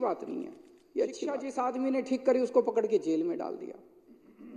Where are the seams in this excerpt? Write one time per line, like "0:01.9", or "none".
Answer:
0:01.5